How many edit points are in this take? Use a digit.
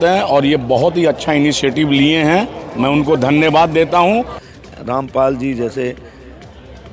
1